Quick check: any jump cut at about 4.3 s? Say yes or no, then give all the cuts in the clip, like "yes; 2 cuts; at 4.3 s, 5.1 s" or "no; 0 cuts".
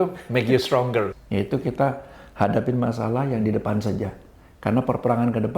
no; 1 cut; at 1.2 s